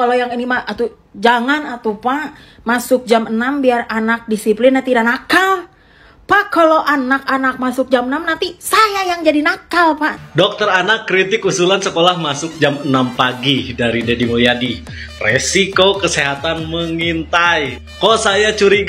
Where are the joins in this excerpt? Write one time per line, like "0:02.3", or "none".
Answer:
0:10.2